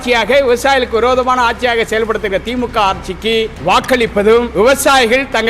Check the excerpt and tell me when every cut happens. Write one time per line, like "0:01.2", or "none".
0:03.5
0:04.5